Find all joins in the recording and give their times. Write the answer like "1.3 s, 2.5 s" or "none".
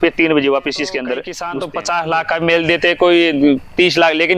1.4 s